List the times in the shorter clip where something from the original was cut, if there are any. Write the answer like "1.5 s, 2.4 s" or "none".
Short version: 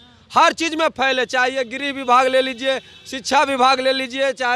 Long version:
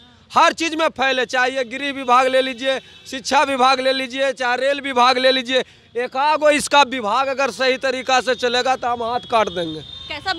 none

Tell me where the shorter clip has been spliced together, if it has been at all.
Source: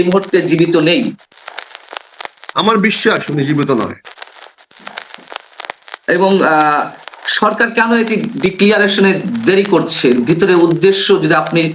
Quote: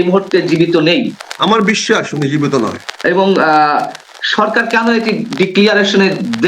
1.2 s, 2.9 s

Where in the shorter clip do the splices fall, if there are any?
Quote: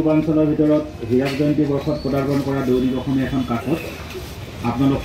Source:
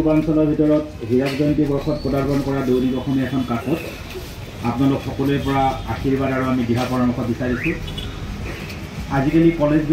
none

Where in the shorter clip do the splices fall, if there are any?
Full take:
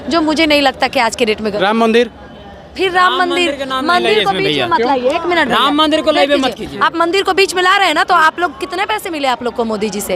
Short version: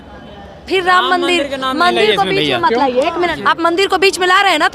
3.3 s

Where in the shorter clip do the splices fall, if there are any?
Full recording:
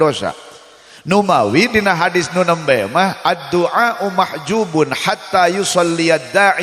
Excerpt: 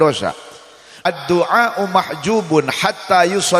1.0 s

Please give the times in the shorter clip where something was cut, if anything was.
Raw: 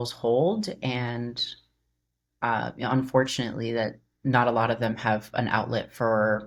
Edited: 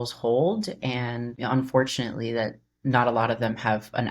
1.4 s

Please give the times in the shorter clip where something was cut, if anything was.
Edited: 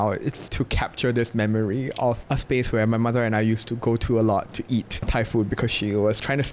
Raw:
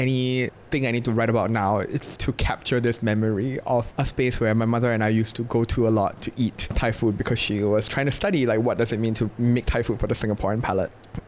none

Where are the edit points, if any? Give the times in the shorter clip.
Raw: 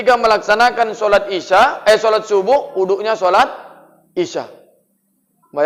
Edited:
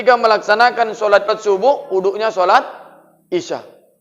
1.3 s

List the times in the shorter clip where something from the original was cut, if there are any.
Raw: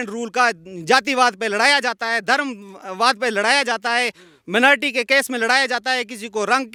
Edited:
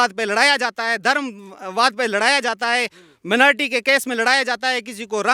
none

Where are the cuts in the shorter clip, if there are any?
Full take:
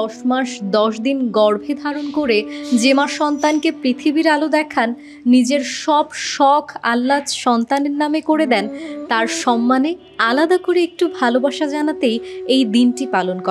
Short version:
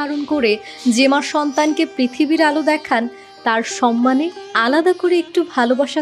3.2 s

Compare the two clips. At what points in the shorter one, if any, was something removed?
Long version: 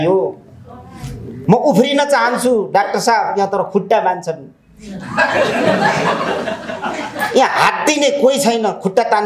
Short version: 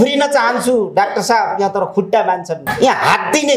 2.6 s

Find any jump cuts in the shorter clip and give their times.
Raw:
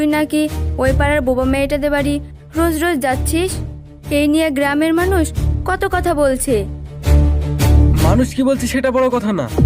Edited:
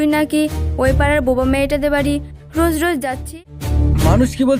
3.3 s

